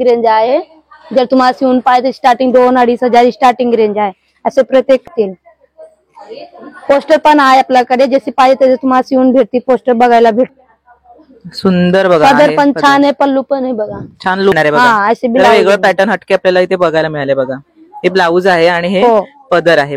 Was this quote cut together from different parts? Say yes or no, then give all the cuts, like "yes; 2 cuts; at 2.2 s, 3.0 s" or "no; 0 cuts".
yes; 3 cuts; at 5.1 s, 10.5 s, 14.5 s